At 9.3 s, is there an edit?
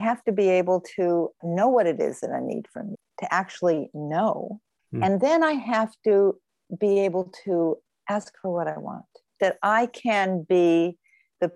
yes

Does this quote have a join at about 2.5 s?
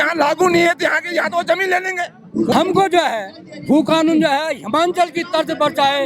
yes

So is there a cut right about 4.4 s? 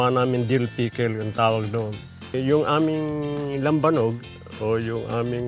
no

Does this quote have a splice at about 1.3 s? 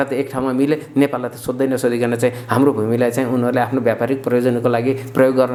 no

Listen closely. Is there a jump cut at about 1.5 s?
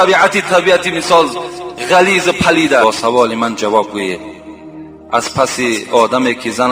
no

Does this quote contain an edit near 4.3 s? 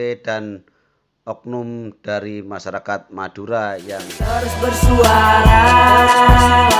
yes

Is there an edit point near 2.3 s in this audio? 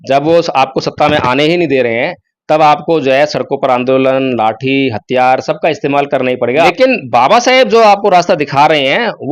no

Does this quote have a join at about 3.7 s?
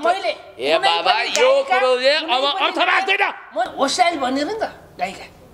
yes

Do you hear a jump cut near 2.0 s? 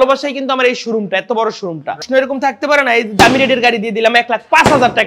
yes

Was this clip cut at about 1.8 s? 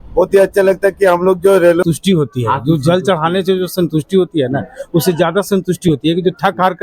yes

